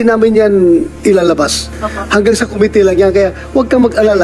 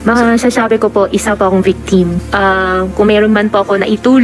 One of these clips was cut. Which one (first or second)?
second